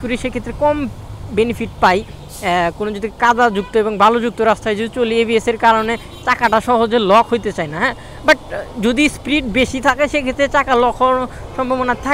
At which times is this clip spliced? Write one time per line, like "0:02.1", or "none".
none